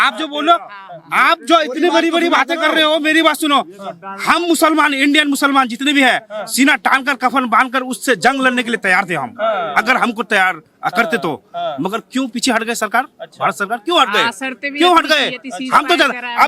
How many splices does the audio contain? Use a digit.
0